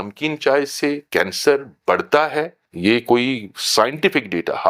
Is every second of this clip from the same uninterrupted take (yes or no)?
no